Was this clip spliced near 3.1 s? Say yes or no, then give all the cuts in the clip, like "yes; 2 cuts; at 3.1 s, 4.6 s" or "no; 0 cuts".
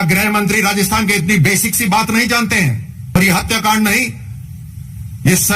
yes; 1 cut; at 3.1 s